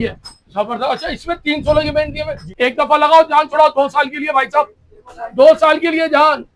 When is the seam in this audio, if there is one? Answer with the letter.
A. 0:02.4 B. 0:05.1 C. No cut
A